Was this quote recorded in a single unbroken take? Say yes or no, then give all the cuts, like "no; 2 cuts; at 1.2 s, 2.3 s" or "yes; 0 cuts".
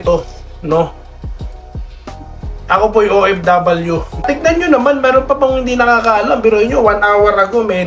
no; 1 cut; at 4.2 s